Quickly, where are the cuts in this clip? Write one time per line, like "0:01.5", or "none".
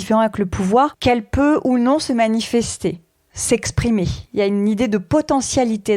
0:01.0